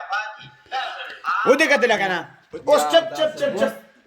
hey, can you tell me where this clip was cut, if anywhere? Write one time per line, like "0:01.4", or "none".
0:01.1